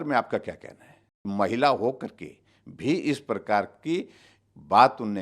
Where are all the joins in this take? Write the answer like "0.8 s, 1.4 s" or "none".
1.2 s